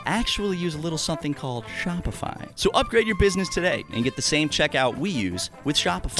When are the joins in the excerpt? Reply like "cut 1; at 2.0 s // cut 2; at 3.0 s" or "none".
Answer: cut 1; at 2.4 s